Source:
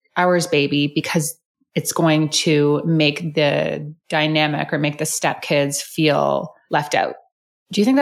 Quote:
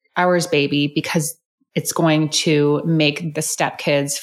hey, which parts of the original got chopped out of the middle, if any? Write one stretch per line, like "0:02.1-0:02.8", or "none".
0:03.3-0:04.9